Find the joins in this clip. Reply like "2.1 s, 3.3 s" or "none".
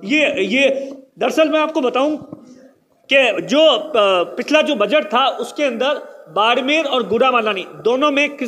none

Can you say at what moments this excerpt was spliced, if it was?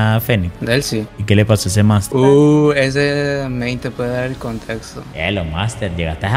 5.1 s

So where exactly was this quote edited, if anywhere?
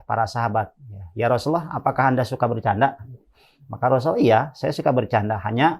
none

